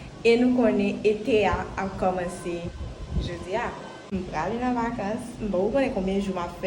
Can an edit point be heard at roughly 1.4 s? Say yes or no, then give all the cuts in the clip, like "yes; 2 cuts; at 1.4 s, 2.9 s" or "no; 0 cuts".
no; 1 cut; at 4.0 s